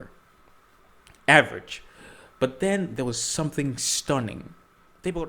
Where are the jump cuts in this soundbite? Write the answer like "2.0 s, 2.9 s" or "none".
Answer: none